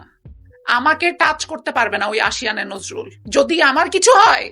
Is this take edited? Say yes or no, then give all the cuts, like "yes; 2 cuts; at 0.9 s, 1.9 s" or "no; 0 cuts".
yes; 1 cut; at 3.2 s